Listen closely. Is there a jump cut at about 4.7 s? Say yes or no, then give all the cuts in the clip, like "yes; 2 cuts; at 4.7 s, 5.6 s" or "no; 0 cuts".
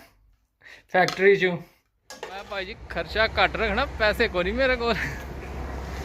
no; 1 cut; at 2.5 s